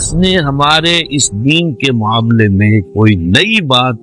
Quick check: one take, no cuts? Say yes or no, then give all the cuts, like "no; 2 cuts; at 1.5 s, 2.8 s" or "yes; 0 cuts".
yes; 0 cuts